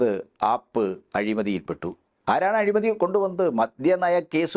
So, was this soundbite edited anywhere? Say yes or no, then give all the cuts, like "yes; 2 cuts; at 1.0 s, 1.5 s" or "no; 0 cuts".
no; 0 cuts